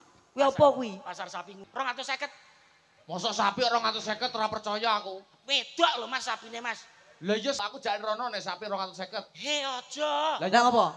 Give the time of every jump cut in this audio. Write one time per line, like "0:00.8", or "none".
0:01.6
0:07.6